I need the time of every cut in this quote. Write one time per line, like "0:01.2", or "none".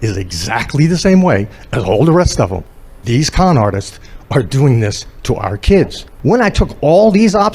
0:06.1